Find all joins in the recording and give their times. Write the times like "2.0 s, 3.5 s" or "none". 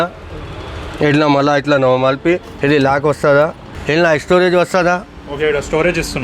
3.7 s